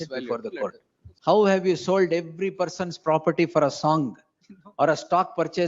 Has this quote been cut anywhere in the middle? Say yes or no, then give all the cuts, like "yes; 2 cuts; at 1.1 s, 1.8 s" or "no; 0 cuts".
yes; 1 cut; at 1.1 s